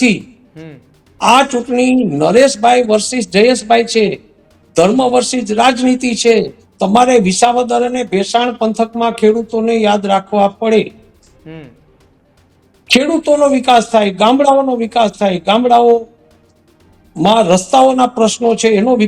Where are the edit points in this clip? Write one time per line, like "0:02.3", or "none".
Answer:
0:06.6